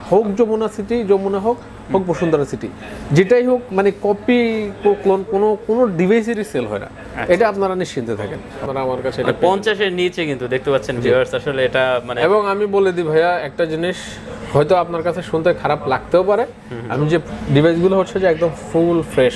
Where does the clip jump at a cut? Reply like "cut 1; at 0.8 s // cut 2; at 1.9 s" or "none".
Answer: cut 1; at 8.6 s // cut 2; at 17.2 s

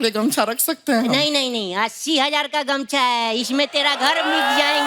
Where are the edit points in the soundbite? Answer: none

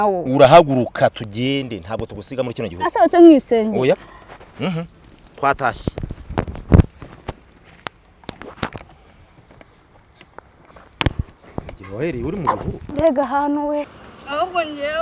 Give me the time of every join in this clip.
cut 1; at 13.9 s

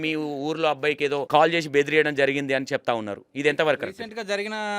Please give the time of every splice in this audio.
cut 1; at 1.2 s

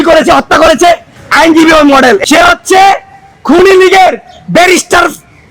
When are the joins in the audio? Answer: cut 1; at 1.1 s // cut 2; at 2.2 s

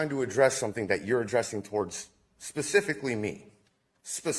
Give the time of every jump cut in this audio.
none

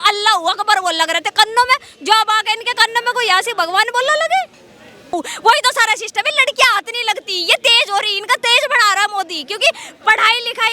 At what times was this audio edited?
cut 1; at 5.1 s

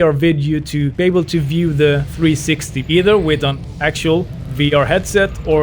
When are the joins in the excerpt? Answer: cut 1; at 0.9 s // cut 2; at 2.1 s

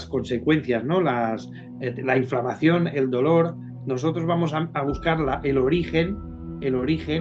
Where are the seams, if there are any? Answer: none

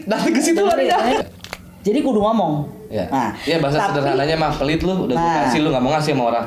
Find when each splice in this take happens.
cut 1; at 1.2 s

